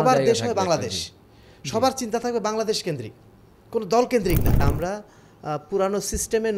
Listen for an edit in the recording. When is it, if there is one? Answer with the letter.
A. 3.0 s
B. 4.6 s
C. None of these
B